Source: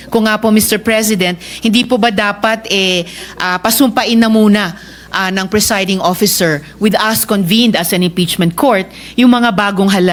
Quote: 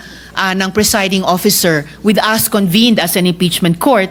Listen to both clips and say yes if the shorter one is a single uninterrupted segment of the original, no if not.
yes